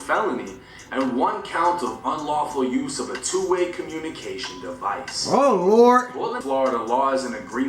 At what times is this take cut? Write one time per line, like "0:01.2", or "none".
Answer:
0:06.4